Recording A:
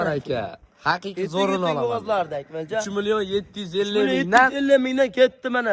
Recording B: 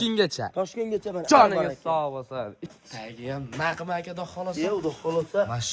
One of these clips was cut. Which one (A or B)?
B